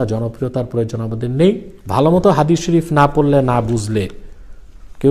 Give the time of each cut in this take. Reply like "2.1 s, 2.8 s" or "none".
1.7 s